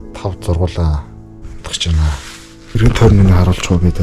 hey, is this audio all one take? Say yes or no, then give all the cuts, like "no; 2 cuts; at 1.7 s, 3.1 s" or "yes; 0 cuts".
no; 2 cuts; at 1.1 s, 2.8 s